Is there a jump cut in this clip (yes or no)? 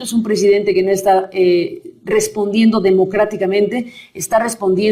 no